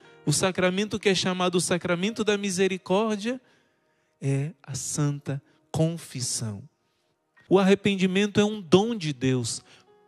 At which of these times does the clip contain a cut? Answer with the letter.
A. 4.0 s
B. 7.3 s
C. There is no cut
B